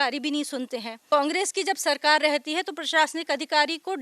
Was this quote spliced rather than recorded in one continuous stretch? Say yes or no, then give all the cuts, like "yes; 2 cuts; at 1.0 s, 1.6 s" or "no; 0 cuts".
yes; 1 cut; at 1.0 s